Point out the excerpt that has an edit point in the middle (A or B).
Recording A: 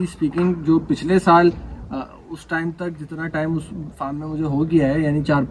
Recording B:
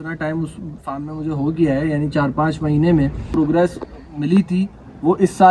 B